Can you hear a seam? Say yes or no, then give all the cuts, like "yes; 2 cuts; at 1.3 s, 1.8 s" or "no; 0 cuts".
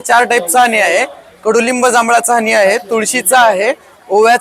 no; 0 cuts